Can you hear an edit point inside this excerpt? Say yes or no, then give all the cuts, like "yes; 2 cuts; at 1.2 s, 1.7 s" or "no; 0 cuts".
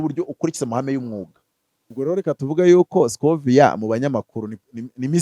yes; 1 cut; at 1.8 s